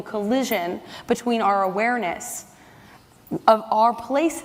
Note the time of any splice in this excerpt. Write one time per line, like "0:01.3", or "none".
none